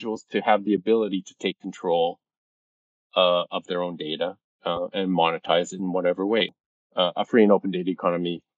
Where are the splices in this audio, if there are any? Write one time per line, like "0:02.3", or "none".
0:06.6